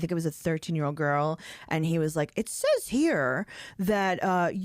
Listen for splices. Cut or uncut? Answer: uncut